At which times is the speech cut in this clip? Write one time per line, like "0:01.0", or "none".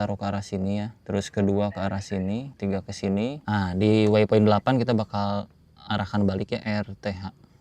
0:01.0
0:02.5
0:03.4
0:06.6